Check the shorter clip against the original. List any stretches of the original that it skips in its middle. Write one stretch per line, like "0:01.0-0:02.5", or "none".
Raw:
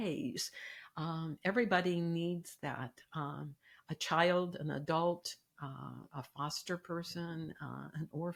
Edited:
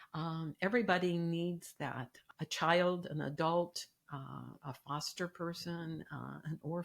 0:03.0-0:03.7